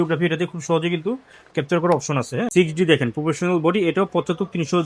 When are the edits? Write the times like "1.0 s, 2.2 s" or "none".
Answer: 2.5 s